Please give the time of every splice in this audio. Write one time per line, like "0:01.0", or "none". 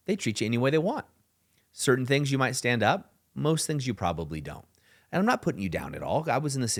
none